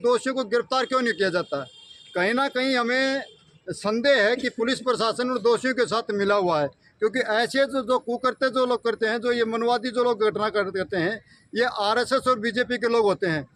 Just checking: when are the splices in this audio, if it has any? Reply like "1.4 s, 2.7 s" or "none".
none